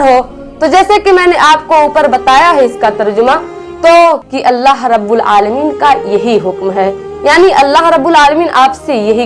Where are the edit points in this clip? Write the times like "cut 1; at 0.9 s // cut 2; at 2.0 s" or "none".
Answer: cut 1; at 4.3 s